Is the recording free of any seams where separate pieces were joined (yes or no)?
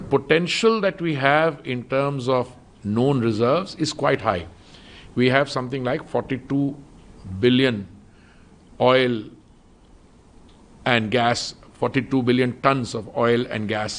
yes